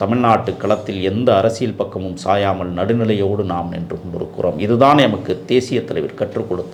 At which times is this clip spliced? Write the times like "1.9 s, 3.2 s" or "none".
none